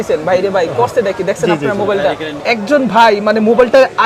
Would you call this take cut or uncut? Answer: cut